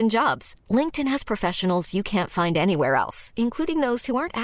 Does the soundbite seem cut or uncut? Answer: uncut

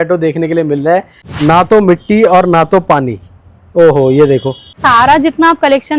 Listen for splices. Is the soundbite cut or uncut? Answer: cut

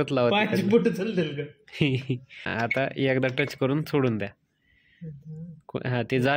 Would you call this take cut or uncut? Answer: cut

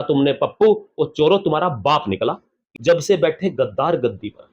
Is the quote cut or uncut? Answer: cut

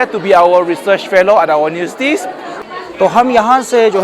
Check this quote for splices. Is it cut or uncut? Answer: cut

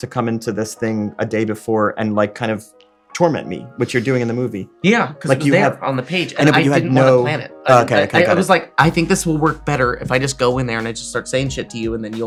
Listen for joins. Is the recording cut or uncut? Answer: uncut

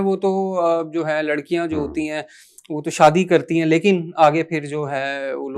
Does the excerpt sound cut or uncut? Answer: uncut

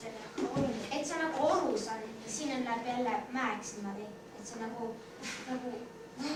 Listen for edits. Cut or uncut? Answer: uncut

